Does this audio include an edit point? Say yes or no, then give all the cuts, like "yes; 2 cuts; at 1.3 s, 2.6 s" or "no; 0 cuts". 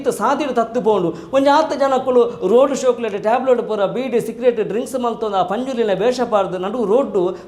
no; 0 cuts